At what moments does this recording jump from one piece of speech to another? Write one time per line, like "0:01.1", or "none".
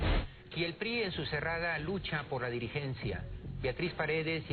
0:02.0